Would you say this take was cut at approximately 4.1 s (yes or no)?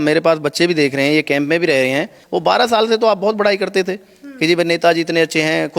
no